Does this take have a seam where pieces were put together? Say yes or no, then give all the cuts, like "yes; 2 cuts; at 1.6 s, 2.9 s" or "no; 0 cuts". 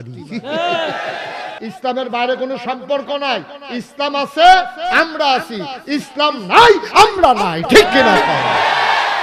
yes; 1 cut; at 1.5 s